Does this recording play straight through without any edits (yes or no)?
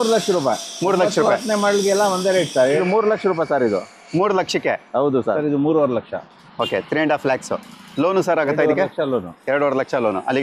no